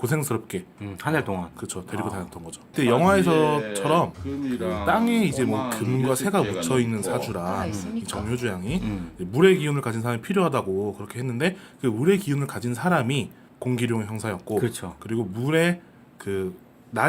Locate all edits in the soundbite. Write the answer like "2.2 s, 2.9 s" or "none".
10.4 s